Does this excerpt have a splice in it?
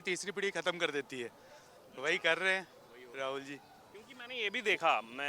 no; 0 cuts

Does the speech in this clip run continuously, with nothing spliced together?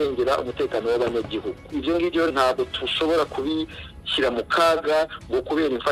no; 1 cut; at 1.6 s

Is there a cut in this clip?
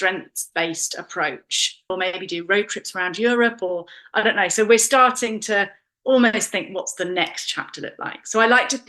yes; 1 cut; at 1.9 s

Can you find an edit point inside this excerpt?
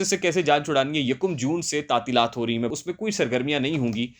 yes; 1 cut; at 2.7 s

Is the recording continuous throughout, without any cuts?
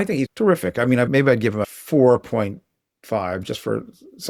yes; 0 cuts

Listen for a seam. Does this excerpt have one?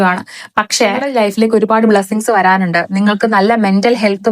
yes; 1 cut; at 1.1 s

